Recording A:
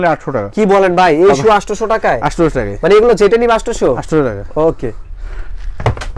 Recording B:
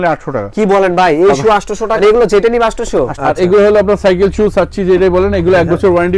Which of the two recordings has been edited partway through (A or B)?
B